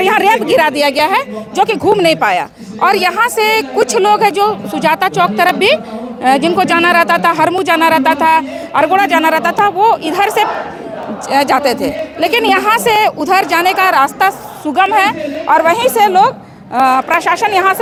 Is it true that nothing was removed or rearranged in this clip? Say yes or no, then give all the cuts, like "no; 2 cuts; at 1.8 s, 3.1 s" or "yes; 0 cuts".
yes; 0 cuts